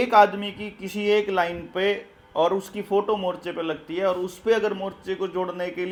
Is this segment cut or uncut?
uncut